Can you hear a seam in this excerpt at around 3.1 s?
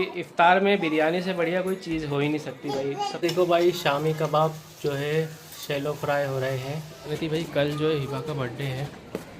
yes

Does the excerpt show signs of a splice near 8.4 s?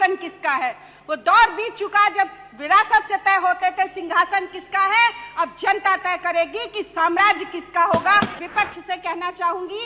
yes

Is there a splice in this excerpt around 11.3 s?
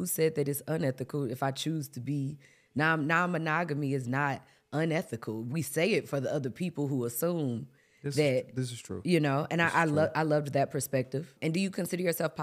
yes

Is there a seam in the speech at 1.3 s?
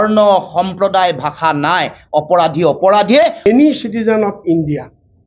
no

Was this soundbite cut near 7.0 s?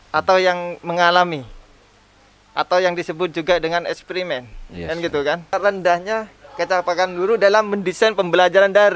no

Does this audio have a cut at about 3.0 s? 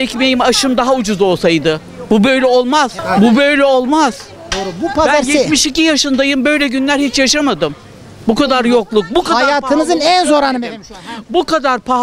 yes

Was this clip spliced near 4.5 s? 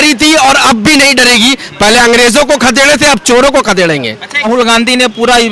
yes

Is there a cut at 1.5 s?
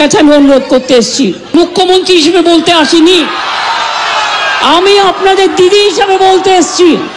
yes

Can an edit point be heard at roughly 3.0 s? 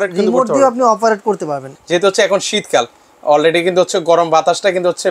no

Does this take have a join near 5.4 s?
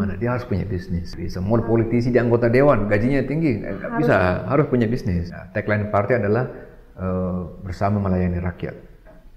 yes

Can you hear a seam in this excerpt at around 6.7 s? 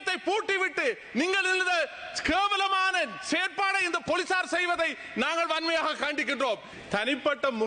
yes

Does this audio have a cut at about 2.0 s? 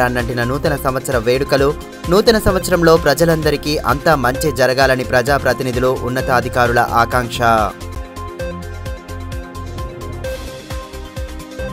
no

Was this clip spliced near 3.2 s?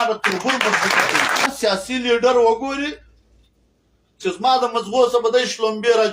no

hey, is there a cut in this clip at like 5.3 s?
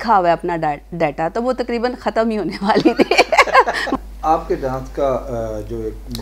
no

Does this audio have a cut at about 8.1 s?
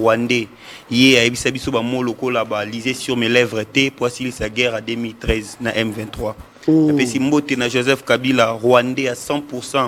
no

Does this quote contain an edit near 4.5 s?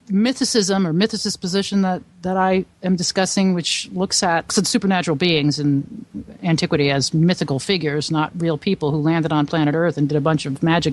yes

